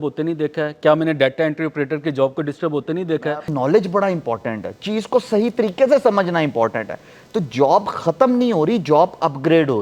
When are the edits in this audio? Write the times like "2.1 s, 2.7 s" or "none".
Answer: 3.2 s